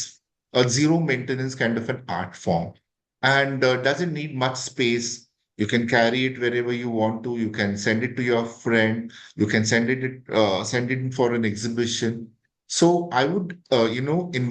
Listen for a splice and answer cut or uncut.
uncut